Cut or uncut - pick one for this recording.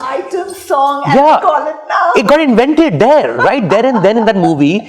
uncut